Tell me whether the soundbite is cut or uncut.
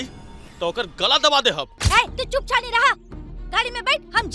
cut